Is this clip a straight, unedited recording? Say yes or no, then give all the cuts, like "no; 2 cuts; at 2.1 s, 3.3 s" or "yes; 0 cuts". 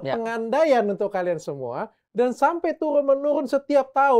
yes; 0 cuts